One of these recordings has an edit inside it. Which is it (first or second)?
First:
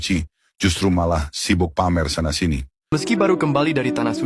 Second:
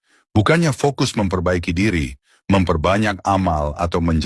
first